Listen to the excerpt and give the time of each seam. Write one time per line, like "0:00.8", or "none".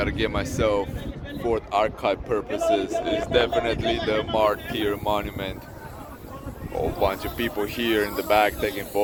none